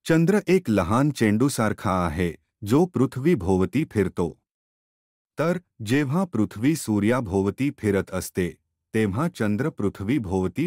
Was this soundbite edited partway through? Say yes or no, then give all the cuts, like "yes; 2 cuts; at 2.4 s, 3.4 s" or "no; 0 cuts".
yes; 1 cut; at 5.1 s